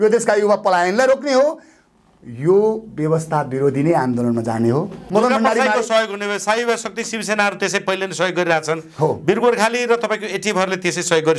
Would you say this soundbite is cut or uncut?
cut